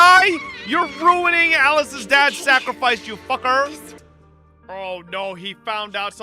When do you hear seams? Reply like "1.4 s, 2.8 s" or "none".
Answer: 3.9 s